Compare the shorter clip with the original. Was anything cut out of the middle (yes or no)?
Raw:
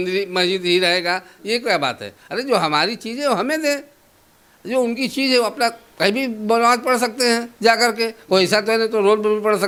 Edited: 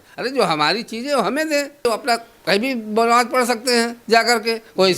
yes